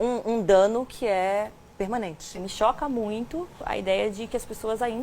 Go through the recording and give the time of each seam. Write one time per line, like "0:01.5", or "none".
0:02.4
0:03.6